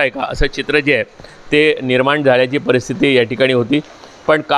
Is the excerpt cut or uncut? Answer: uncut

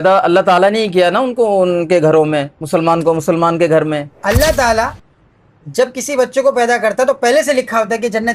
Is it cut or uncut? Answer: cut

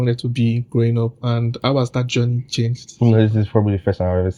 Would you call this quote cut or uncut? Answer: uncut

